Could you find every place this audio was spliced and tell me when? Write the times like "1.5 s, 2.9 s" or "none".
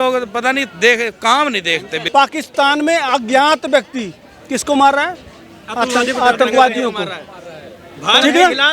2.0 s